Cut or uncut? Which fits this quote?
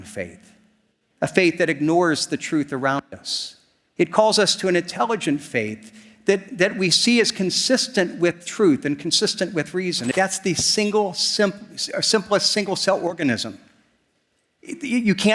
cut